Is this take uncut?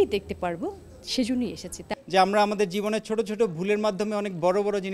no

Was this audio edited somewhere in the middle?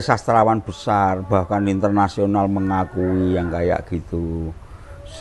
no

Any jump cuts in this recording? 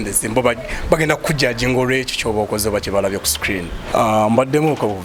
yes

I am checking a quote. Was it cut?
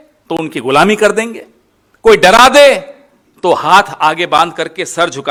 no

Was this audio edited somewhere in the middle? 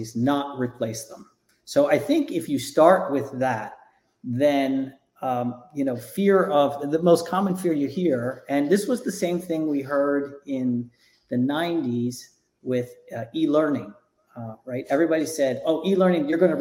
no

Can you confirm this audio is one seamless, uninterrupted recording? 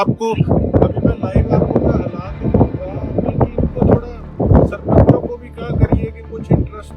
yes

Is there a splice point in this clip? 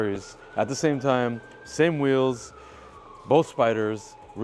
no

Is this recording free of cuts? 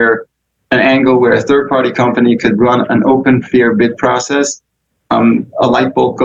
yes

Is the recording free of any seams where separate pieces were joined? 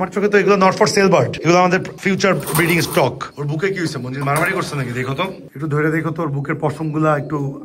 no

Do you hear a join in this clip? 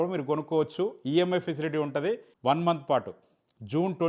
yes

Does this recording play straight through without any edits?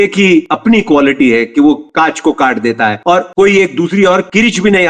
yes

